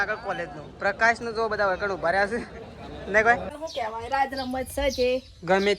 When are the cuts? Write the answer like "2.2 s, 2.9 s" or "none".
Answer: 3.5 s